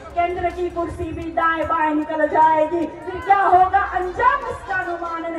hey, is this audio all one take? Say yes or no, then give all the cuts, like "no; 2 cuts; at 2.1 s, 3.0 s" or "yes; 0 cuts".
yes; 0 cuts